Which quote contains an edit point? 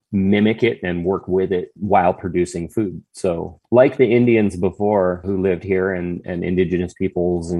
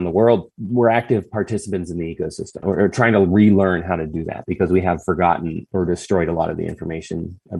second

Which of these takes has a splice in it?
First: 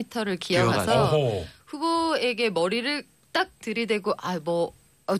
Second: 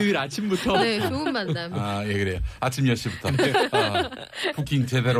first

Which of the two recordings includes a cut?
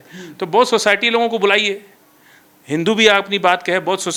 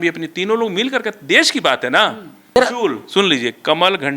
second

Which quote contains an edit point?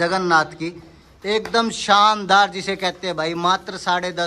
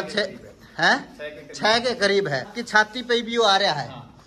second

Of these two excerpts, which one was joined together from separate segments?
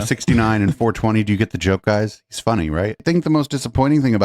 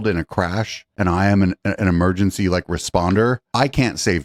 first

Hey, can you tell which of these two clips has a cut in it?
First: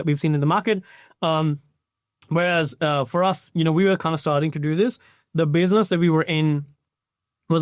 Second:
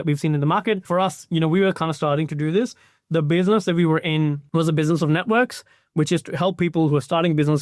second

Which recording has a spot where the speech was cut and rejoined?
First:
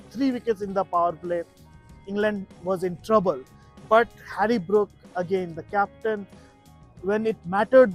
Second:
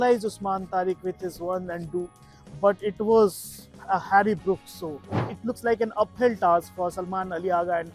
second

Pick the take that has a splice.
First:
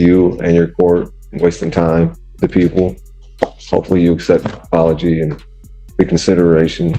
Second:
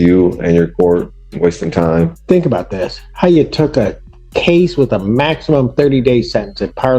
second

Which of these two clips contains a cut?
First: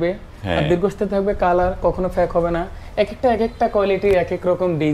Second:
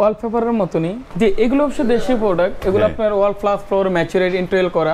second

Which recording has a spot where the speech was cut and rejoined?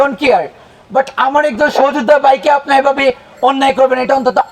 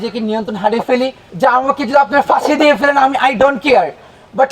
second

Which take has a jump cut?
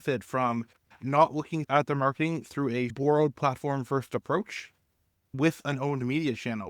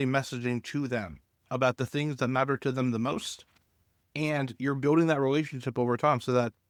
first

